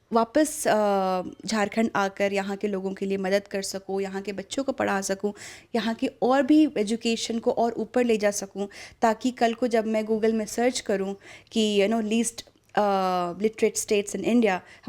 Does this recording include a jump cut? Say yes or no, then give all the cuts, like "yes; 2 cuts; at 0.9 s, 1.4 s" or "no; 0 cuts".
no; 0 cuts